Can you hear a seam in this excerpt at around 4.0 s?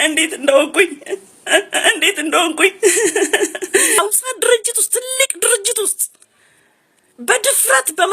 yes; 1 cut; at 4.0 s

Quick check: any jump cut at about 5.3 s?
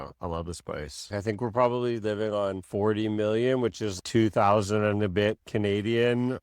no; 1 cut; at 1.1 s

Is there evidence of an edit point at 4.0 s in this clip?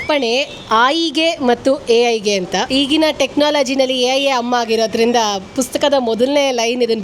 no; 1 cut; at 2.7 s

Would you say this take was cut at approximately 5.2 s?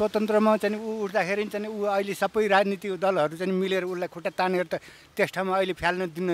no; 0 cuts

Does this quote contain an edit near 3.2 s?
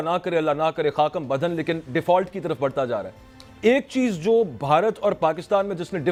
no; 0 cuts

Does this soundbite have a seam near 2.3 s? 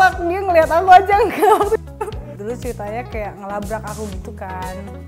yes; 1 cut; at 2.3 s

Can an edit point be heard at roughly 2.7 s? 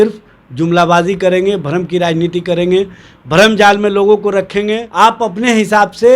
no; 1 cut; at 4.9 s

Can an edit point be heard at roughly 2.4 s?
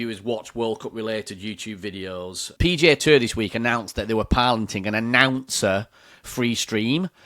yes; 1 cut; at 2.4 s

